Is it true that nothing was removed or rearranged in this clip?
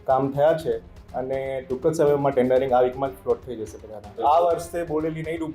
no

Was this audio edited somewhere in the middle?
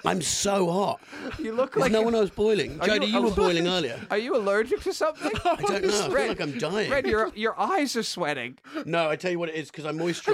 no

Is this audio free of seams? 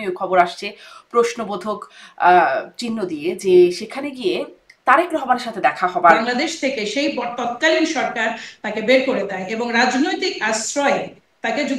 no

